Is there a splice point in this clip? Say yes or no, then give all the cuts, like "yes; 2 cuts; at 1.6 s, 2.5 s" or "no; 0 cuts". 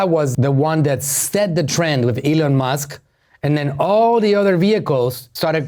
no; 0 cuts